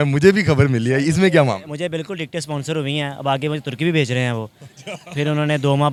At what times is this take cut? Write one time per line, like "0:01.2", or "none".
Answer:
none